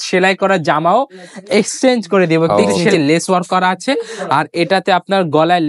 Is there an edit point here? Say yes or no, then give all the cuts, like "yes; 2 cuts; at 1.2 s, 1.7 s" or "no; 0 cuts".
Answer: yes; 1 cut; at 2.9 s